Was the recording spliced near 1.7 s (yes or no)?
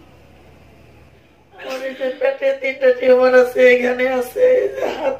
yes